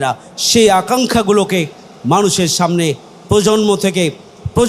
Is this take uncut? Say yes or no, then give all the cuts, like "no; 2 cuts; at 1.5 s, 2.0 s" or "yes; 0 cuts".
yes; 0 cuts